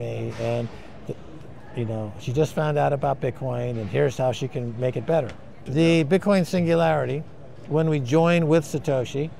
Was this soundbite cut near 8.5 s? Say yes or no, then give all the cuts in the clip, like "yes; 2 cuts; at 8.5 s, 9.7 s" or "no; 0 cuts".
no; 1 cut; at 5.7 s